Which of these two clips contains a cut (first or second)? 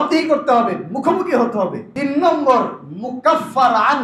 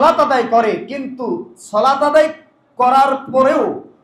first